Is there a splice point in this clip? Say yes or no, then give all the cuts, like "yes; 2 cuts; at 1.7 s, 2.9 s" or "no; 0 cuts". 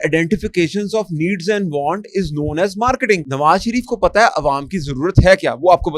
yes; 1 cut; at 3.3 s